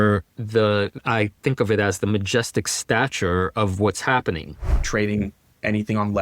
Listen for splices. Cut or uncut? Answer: cut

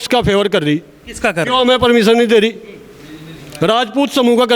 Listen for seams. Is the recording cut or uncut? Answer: uncut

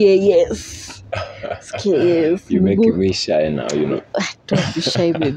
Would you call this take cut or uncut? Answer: uncut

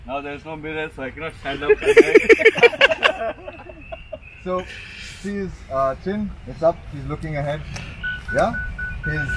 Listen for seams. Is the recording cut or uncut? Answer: uncut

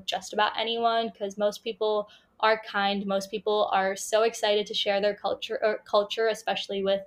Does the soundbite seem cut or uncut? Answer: uncut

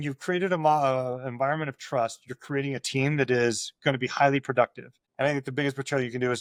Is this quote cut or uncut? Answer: uncut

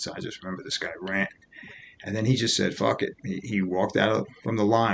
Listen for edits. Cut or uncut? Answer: uncut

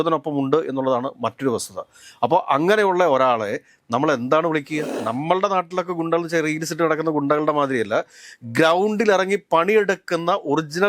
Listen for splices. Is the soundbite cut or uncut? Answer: cut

